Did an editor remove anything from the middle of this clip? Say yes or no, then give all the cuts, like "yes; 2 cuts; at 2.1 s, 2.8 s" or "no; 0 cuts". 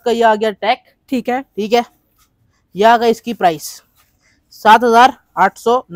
no; 0 cuts